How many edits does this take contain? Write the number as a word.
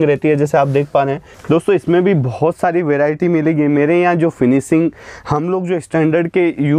one